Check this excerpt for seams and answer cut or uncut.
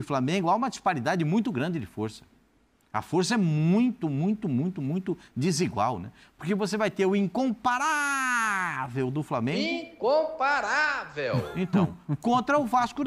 uncut